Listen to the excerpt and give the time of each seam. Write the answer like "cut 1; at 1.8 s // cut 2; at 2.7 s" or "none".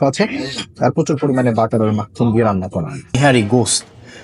cut 1; at 3.2 s

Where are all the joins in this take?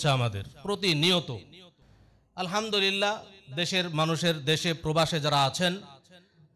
none

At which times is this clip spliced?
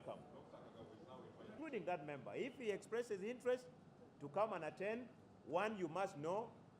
cut 1; at 1.5 s

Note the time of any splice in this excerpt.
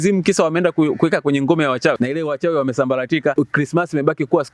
cut 1; at 2.0 s // cut 2; at 3.3 s

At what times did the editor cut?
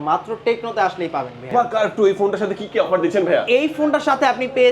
cut 1; at 1.5 s

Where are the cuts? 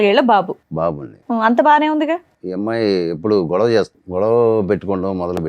cut 1; at 2.4 s // cut 2; at 4.0 s

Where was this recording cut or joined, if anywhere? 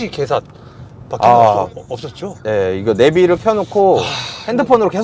none

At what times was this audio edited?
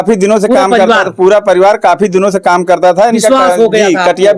none

